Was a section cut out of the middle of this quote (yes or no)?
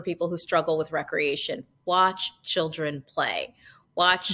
no